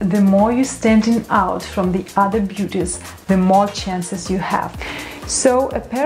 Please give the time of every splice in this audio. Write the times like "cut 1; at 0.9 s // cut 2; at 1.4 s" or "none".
cut 1; at 4.8 s